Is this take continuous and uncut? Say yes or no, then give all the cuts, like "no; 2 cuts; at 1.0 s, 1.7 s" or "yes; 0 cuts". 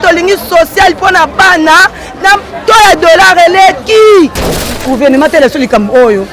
no; 1 cut; at 4.4 s